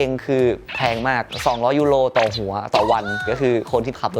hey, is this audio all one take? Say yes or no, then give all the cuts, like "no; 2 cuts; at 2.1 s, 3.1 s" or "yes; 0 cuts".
no; 1 cut; at 3.2 s